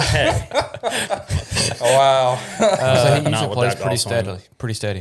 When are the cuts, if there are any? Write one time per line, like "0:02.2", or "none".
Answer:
0:03.2

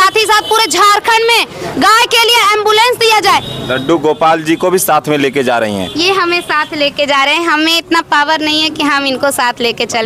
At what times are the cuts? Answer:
0:03.2

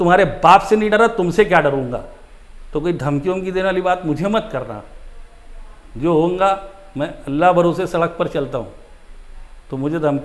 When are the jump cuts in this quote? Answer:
none

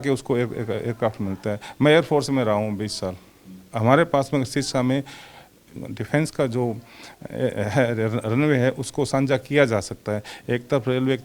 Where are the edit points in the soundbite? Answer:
0:05.6

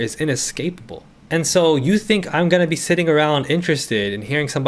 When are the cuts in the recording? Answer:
none

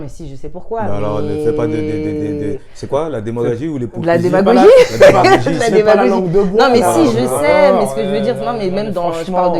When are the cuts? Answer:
none

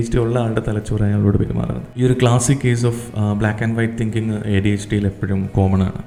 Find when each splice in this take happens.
none

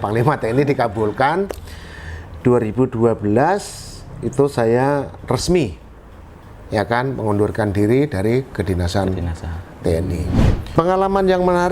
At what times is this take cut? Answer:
0:10.6

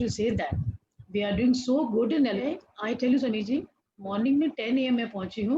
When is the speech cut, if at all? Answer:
0:02.4

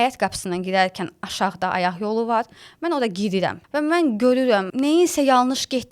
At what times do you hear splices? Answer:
0:03.6
0:04.7

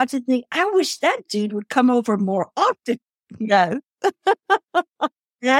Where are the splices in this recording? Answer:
none

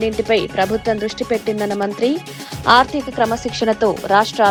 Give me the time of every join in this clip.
none

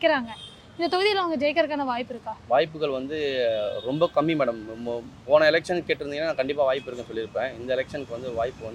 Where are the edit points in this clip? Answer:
none

